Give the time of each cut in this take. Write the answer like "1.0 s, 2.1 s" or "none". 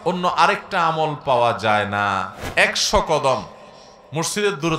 2.4 s